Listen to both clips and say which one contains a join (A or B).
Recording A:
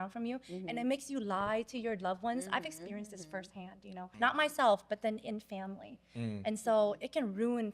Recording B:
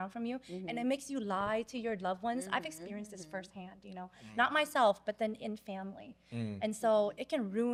A